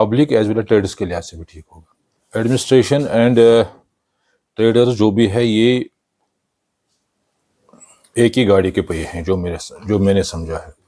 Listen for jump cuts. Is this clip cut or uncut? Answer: cut